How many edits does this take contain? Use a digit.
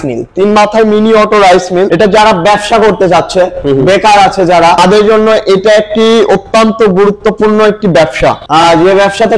3